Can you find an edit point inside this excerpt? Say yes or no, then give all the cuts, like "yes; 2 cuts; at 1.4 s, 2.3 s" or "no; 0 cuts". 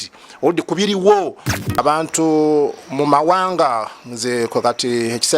yes; 1 cut; at 1.4 s